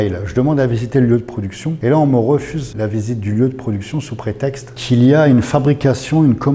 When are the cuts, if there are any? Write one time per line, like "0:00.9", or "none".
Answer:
0:01.7
0:02.6
0:04.7